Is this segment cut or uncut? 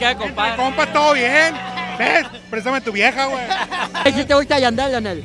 cut